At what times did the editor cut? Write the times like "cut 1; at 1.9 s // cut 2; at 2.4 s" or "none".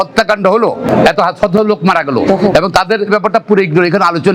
cut 1; at 2.3 s